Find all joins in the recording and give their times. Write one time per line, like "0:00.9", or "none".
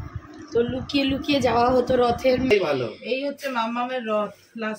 0:02.5